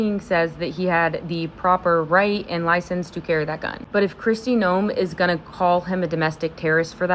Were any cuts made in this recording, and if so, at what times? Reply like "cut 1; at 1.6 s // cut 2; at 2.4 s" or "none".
cut 1; at 3.8 s